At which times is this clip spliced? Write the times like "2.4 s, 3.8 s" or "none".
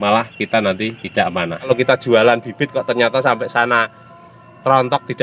1.7 s

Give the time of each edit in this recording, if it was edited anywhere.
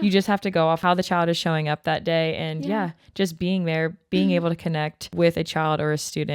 0.8 s, 5.0 s

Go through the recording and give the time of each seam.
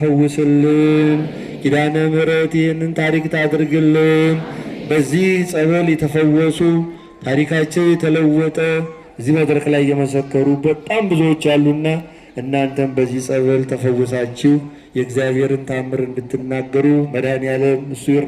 none

